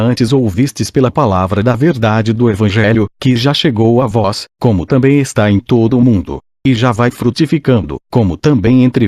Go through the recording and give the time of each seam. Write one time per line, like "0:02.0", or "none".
none